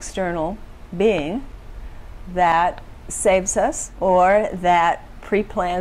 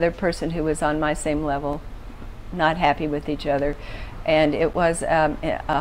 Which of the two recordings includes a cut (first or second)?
first